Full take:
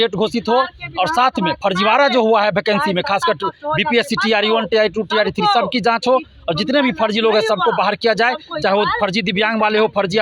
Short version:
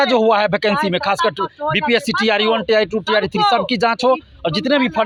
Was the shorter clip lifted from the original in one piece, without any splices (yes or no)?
yes